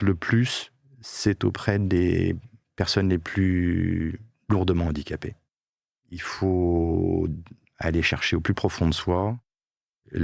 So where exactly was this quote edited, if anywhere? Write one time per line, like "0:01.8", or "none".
0:05.6